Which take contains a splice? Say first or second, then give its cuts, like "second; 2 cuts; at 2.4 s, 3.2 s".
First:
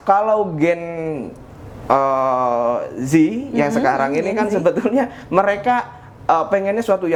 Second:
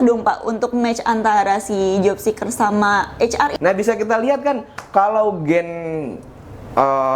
second; 1 cut; at 3.5 s